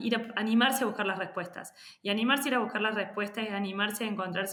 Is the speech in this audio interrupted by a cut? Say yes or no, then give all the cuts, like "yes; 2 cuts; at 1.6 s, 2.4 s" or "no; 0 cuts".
no; 0 cuts